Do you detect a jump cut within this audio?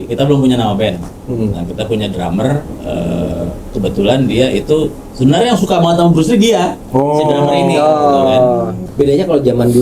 yes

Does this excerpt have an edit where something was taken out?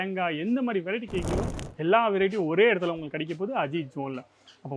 no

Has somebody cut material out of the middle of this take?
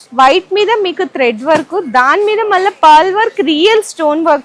no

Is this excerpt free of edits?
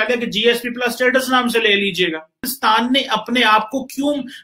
no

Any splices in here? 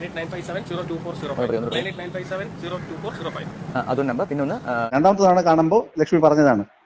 yes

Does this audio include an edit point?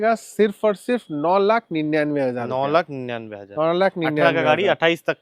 no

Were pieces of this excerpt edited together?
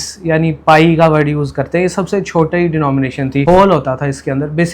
yes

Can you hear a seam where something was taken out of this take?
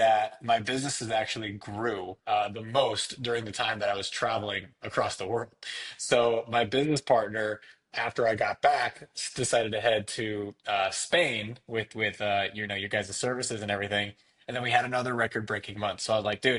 yes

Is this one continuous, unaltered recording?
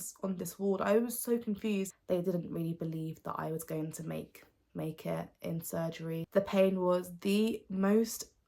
no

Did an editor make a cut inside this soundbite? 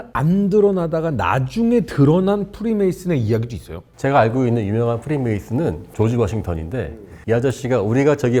no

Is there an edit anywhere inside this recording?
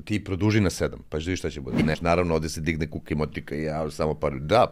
yes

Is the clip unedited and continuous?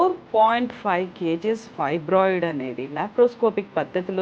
yes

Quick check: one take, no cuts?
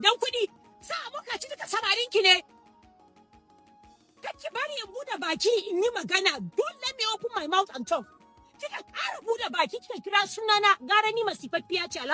yes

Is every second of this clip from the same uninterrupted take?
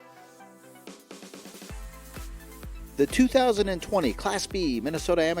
no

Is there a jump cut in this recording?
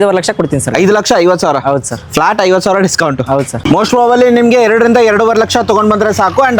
yes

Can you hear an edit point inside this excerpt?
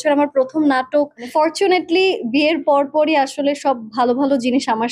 yes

